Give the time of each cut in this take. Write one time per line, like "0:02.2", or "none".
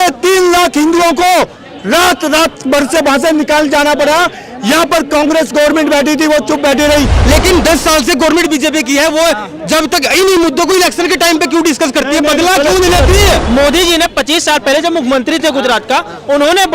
0:07.2
0:13.4